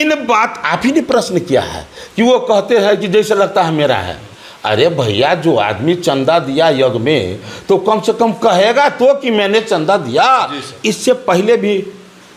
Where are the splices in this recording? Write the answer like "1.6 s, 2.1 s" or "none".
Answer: none